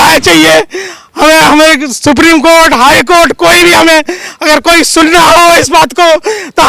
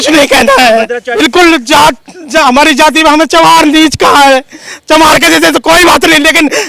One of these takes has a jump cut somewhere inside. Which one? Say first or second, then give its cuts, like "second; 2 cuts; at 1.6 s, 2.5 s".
second; 1 cut; at 1.1 s